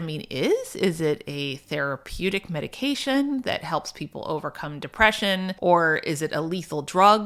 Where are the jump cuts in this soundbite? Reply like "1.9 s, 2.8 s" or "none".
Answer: none